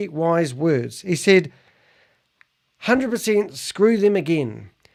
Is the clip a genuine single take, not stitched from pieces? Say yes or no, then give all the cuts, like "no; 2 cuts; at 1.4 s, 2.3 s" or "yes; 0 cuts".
yes; 0 cuts